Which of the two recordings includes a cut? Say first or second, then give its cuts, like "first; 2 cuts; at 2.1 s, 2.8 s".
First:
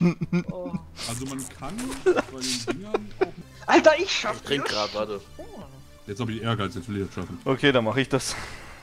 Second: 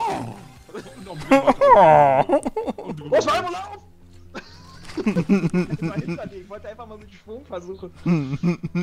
first; 1 cut; at 3.5 s